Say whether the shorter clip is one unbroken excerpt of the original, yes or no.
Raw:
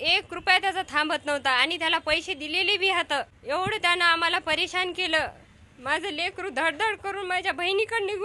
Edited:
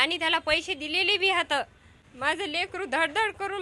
no